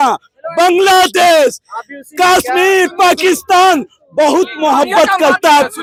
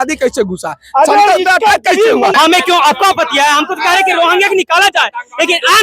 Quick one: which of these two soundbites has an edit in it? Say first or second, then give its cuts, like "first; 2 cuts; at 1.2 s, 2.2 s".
second; 1 cut; at 2.3 s